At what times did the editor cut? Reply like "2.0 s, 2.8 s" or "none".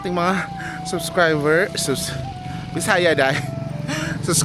none